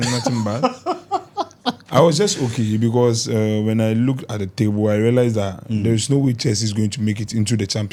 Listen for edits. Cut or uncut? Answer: uncut